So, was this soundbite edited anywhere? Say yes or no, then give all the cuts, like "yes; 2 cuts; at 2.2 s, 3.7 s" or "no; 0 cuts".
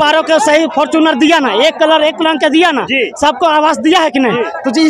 no; 0 cuts